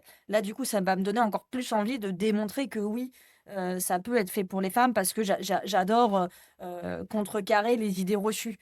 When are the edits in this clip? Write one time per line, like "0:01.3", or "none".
none

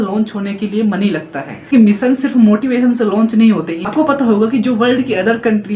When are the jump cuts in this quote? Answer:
0:01.7
0:03.8

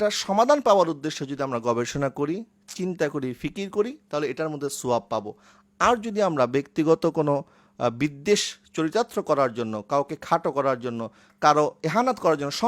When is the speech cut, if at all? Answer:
none

